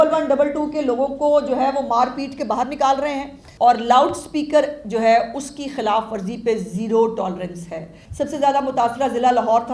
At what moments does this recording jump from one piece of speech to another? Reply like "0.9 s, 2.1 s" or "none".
3.4 s, 8.0 s